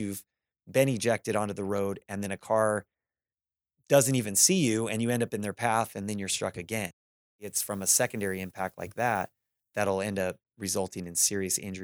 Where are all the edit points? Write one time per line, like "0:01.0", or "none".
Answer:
0:07.5